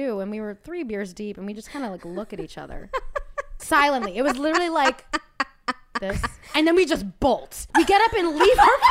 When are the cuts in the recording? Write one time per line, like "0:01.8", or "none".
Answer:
0:03.6
0:06.5
0:07.6